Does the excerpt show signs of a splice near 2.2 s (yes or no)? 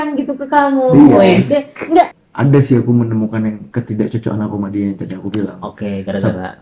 yes